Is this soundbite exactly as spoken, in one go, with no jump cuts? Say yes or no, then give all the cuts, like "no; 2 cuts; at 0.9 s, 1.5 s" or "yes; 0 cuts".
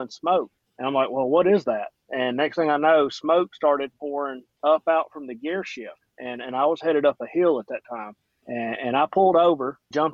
yes; 0 cuts